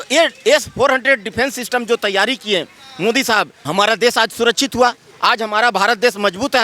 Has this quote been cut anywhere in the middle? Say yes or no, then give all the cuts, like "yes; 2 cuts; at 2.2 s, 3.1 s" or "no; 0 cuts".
yes; 1 cut; at 3.6 s